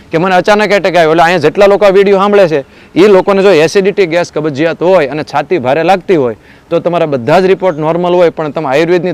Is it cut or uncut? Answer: uncut